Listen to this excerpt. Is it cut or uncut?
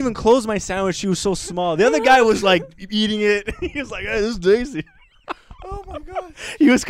uncut